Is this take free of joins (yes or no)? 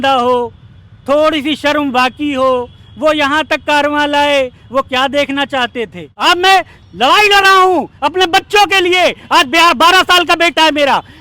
no